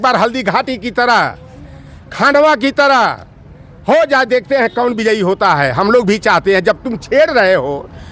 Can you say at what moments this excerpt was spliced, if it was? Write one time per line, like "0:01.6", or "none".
none